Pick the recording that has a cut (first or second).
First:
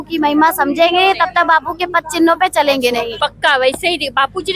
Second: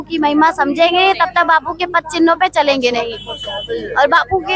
first